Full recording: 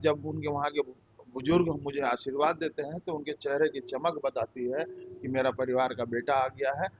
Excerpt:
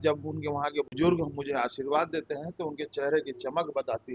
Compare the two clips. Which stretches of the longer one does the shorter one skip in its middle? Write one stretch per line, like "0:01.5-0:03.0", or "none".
0:00.9-0:01.4